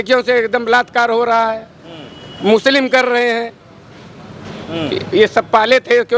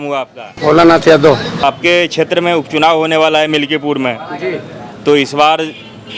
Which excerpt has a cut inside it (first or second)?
second